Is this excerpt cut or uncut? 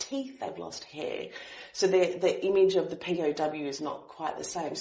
uncut